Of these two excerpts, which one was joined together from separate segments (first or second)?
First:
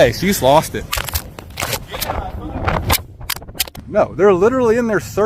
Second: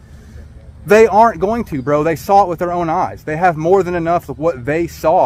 first